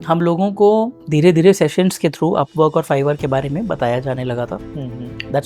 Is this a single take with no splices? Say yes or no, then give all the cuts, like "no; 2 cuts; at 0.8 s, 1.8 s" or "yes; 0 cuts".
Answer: yes; 0 cuts